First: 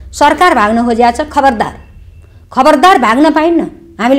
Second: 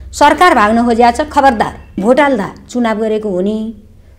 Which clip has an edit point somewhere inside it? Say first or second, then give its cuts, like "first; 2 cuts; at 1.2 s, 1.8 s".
second; 1 cut; at 2.0 s